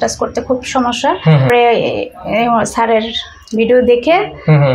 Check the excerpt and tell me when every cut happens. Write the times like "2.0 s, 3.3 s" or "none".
1.5 s